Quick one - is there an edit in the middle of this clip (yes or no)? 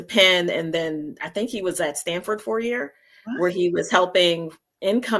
no